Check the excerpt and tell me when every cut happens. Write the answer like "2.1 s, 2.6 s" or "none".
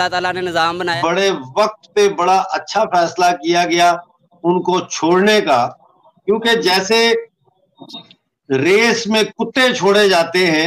0.9 s